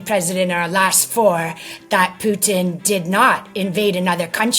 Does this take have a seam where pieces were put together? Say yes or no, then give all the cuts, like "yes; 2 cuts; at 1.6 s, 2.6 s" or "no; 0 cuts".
no; 0 cuts